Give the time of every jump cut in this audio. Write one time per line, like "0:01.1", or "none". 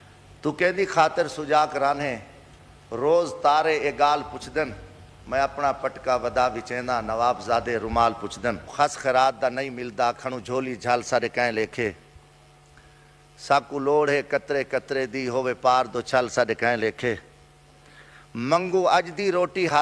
0:08.7